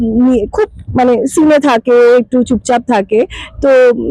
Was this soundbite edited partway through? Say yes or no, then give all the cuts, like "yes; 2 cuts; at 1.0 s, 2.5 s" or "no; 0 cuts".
no; 0 cuts